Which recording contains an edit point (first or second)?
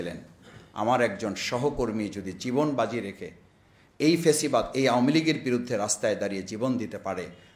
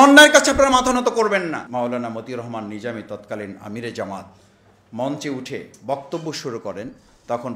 second